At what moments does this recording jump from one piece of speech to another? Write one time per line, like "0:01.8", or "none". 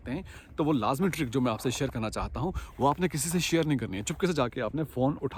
none